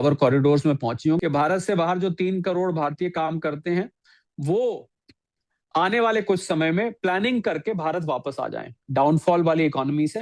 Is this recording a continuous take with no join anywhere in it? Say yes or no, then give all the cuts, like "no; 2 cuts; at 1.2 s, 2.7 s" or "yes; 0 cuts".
no; 2 cuts; at 1.2 s, 8.7 s